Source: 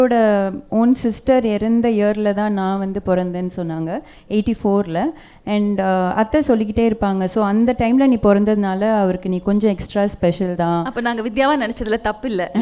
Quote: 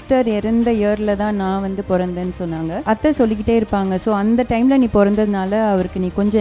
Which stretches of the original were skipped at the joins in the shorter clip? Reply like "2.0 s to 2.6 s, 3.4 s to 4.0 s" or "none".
4.0 s to 6.1 s